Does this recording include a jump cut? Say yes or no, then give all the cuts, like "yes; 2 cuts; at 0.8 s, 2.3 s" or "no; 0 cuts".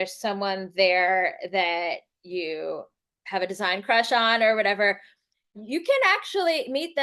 no; 0 cuts